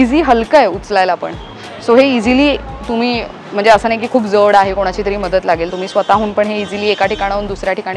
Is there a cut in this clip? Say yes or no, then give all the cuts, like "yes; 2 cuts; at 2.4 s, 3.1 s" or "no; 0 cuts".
no; 0 cuts